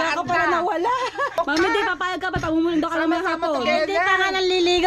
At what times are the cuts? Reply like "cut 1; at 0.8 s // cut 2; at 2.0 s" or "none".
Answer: cut 1; at 1.4 s